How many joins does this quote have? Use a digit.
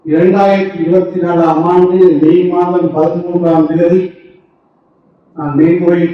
0